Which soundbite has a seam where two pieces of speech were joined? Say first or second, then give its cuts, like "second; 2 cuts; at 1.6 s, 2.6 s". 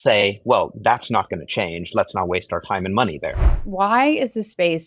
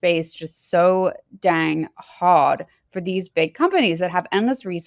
first; 1 cut; at 3.6 s